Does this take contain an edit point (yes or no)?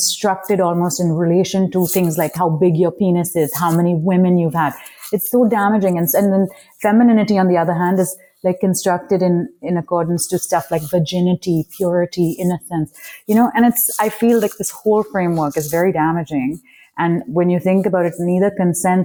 no